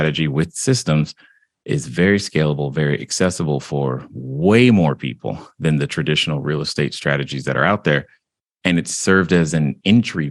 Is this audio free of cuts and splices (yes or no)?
yes